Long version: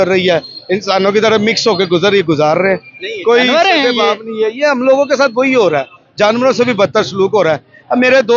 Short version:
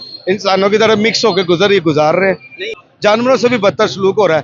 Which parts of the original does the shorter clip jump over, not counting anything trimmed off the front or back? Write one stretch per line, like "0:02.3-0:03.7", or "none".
0:03.1-0:05.9